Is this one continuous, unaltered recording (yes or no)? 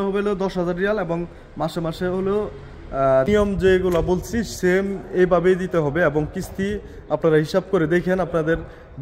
no